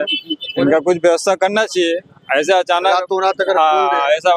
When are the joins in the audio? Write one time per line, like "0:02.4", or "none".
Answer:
none